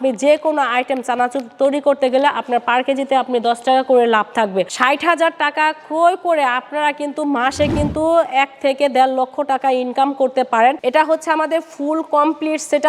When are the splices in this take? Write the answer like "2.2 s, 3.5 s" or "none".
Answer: 4.6 s, 10.8 s